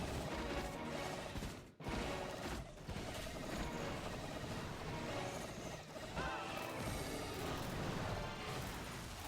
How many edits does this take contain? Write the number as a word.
one